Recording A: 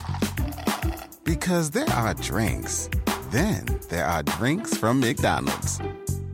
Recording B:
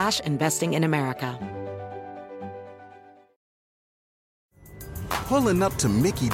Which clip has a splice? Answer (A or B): B